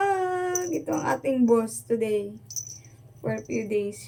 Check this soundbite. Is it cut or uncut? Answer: uncut